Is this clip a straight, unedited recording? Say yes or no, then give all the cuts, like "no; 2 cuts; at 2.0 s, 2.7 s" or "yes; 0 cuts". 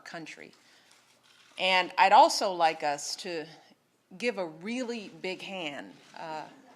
no; 1 cut; at 2.1 s